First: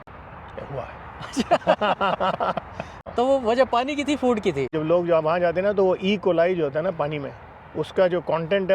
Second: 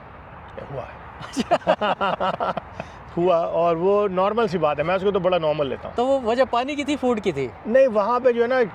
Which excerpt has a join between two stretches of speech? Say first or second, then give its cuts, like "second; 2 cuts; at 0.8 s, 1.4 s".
first; 2 cuts; at 3.0 s, 4.8 s